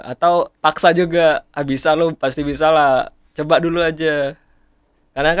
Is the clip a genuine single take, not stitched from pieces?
yes; 0 cuts

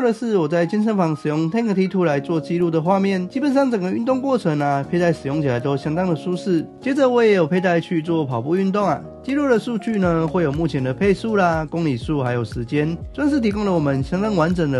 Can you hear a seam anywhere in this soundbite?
yes; 2 cuts; at 6.7 s, 13.1 s

